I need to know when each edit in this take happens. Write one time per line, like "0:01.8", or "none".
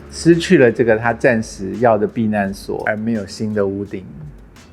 0:02.8